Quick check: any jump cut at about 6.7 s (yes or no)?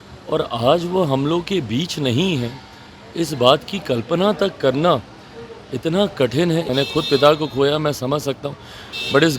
yes